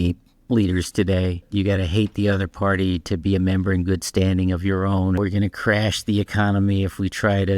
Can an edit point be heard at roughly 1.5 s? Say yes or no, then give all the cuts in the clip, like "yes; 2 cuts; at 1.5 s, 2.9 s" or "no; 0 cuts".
yes; 2 cuts; at 1.5 s, 5.2 s